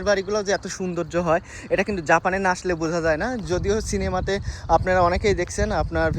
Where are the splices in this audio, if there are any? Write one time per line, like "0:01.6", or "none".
none